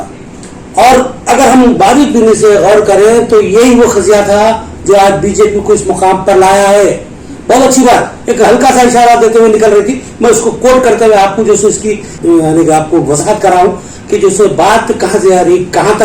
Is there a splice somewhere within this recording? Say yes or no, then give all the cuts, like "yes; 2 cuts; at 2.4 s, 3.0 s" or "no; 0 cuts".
yes; 1 cut; at 12.2 s